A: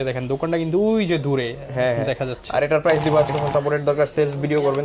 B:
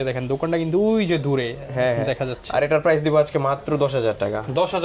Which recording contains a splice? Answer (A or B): A